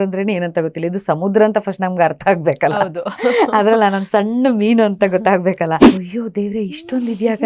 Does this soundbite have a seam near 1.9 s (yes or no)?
no